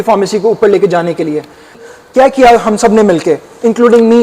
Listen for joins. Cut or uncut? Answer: cut